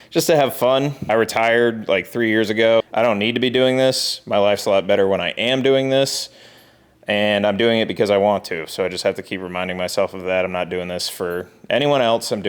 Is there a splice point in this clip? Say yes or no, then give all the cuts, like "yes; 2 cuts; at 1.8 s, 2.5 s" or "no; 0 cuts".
yes; 2 cuts; at 1.0 s, 2.8 s